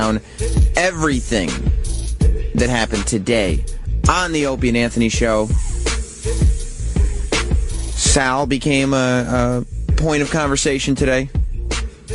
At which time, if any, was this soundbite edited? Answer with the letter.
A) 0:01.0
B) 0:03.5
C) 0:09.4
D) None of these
C